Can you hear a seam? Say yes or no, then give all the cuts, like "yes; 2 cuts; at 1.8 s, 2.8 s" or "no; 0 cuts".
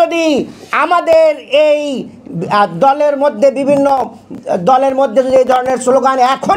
no; 0 cuts